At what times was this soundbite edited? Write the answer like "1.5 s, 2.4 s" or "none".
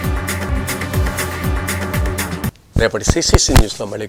none